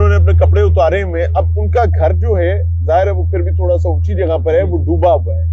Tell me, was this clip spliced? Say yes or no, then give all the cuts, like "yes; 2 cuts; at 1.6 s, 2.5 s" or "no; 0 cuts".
no; 0 cuts